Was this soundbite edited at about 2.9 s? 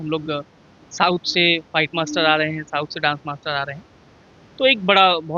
no; 0 cuts

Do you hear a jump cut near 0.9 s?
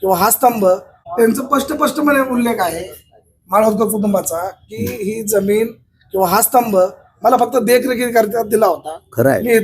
yes; 1 cut; at 0.9 s

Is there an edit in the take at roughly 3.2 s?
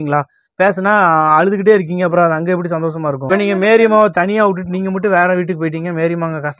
yes; 1 cut; at 3.2 s

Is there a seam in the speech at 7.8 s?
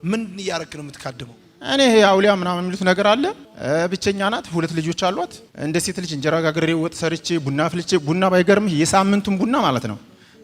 no; 2 cuts; at 3.5 s, 5.4 s

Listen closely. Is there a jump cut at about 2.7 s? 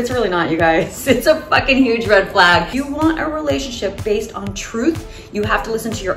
yes; 1 cut; at 2.7 s

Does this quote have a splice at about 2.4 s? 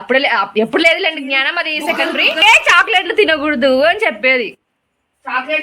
yes; 1 cut; at 2.4 s

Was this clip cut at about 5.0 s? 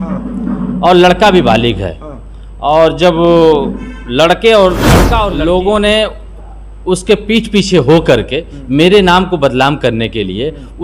yes; 1 cut; at 5.0 s

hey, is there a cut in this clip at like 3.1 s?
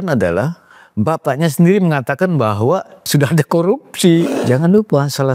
yes; 2 cuts; at 3.1 s, 4.4 s

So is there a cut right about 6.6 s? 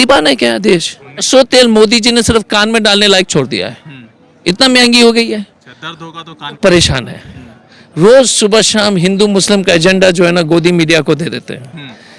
yes; 2 cuts; at 1.3 s, 6.6 s

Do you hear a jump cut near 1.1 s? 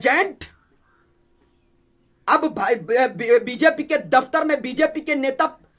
no; 0 cuts

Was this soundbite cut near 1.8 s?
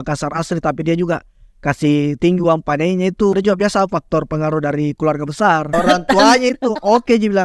no; 2 cuts; at 3.3 s, 5.7 s

